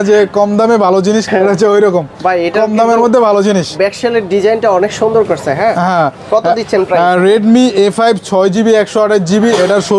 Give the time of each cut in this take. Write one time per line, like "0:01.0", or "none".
none